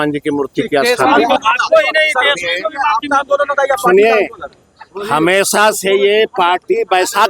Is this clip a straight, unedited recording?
no; 1 cut; at 1.4 s

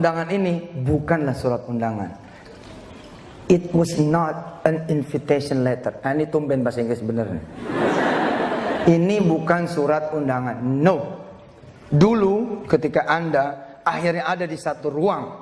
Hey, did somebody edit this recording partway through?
no; 0 cuts

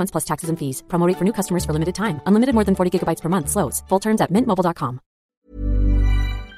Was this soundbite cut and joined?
yes; 1 cut; at 5.4 s

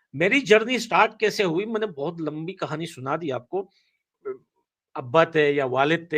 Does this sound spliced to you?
yes; 1 cut; at 4.2 s

